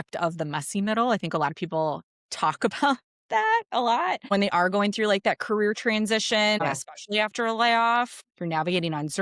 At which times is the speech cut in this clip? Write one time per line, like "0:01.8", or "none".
0:04.3
0:06.6
0:08.2